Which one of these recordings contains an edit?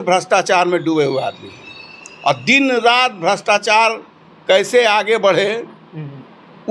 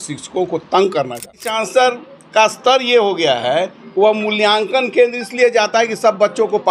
second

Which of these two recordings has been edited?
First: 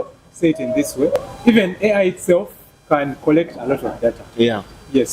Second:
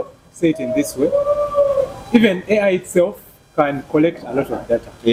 first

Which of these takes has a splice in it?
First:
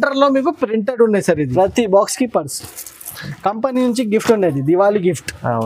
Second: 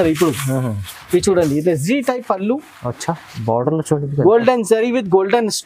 first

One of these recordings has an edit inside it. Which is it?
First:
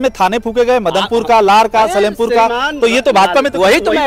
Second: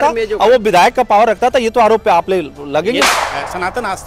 second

